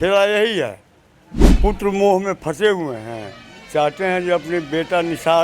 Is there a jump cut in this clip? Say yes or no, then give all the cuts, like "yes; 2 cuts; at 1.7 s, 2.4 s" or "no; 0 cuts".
yes; 1 cut; at 1.5 s